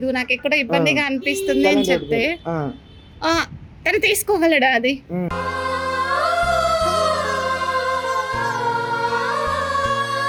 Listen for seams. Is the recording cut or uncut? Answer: uncut